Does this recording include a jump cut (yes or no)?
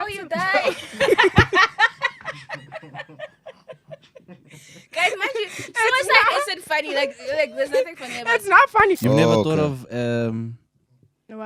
yes